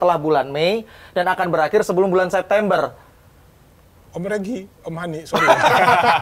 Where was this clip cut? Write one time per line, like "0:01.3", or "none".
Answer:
none